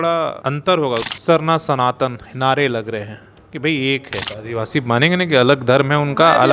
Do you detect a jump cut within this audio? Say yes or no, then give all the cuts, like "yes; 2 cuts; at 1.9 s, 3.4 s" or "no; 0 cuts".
yes; 2 cuts; at 1.0 s, 4.3 s